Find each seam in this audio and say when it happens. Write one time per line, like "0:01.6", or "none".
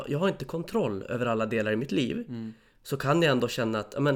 none